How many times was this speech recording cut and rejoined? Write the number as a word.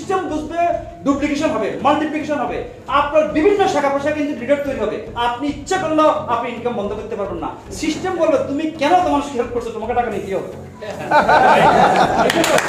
zero